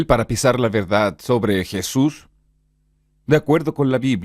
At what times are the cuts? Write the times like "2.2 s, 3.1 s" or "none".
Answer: none